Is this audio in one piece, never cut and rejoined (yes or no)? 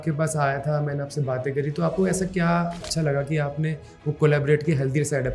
no